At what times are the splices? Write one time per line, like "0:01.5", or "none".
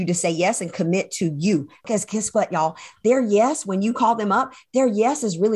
0:01.8

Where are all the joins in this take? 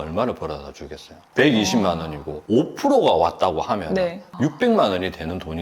none

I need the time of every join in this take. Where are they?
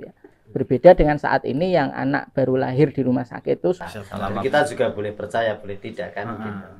0:03.8

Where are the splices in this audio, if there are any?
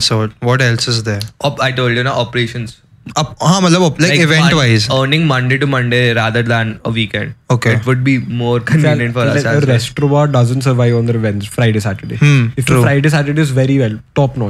none

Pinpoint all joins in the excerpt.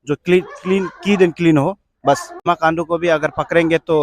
0:02.4

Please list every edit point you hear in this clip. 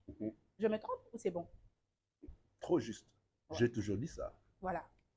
none

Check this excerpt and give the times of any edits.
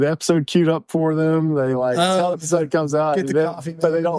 0:02.4

